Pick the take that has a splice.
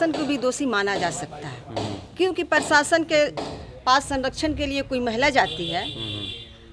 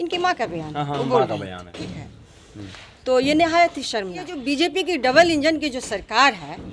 second; 1 cut; at 4.3 s

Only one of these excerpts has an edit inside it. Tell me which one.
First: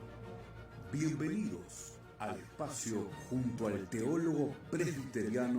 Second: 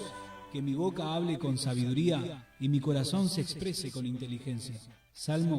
first; 1 cut; at 4.2 s

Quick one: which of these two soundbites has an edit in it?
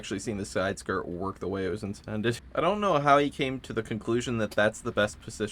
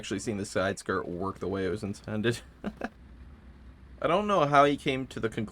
first; 1 cut; at 2.4 s

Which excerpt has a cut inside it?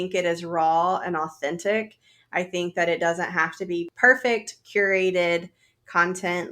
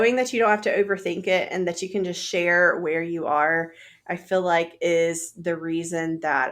first; 1 cut; at 3.9 s

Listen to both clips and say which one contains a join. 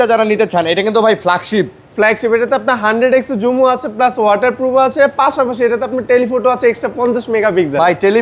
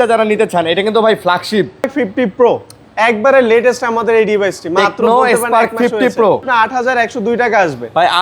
second; 2 cuts; at 1.9 s, 6.5 s

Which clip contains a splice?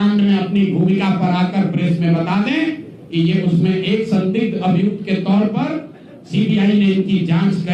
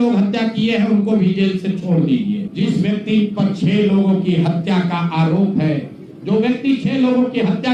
second; 1 cut; at 2.5 s

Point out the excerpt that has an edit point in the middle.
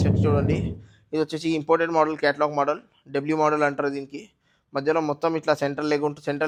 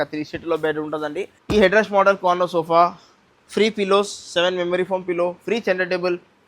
second; 1 cut; at 1.4 s

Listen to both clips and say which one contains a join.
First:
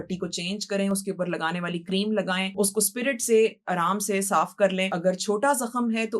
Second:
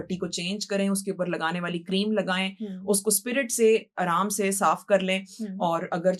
first; 2 cuts; at 2.5 s, 4.9 s

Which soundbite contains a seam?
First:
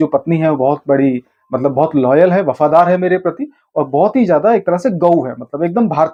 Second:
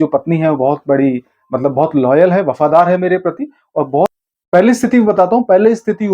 second; 1 cut; at 4.1 s

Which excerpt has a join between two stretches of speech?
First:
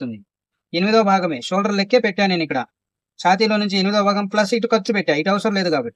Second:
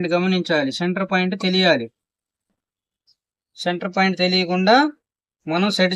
second; 1 cut; at 2.5 s

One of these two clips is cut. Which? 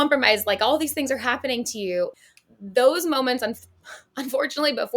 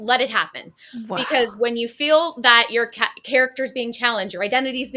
first; 1 cut; at 2.1 s

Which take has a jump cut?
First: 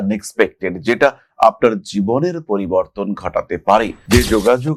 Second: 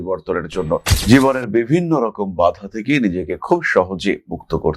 second; 1 cut; at 0.9 s

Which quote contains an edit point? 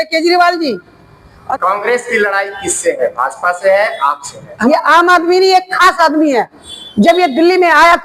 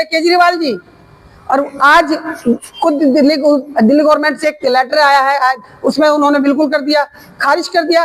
first; 2 cuts; at 1.4 s, 4.5 s

